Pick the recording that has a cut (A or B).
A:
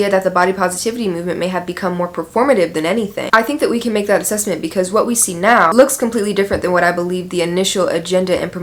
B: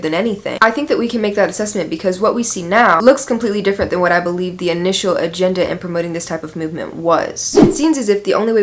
B